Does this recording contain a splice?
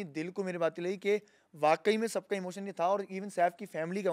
no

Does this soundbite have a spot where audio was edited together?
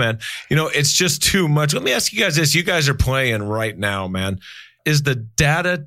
yes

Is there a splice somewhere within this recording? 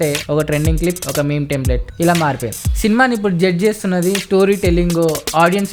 no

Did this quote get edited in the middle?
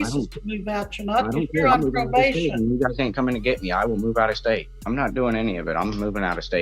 yes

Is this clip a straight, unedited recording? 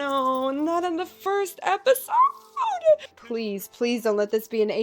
no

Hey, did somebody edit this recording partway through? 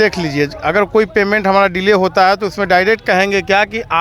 no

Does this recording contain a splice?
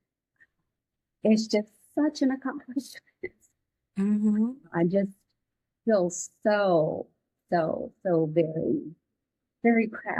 no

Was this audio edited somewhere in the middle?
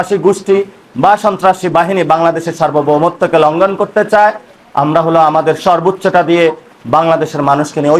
no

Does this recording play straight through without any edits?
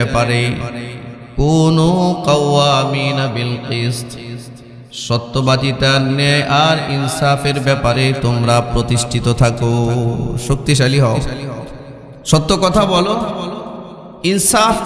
yes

